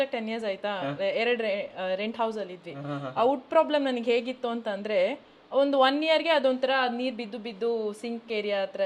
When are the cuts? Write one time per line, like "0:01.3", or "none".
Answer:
none